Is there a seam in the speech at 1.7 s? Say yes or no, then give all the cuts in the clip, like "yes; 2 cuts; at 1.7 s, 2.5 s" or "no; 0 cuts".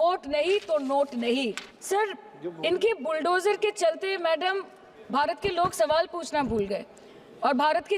yes; 1 cut; at 1.7 s